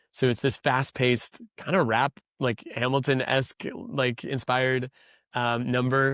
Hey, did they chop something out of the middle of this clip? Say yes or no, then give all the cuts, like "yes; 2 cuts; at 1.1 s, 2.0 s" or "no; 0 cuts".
no; 0 cuts